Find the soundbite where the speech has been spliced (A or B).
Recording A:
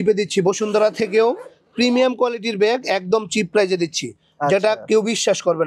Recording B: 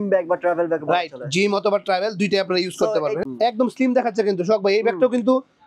B